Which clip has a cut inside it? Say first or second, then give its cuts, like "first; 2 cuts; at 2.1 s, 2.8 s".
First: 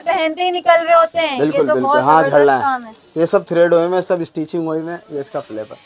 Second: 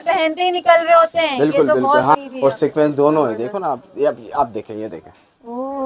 second; 1 cut; at 2.0 s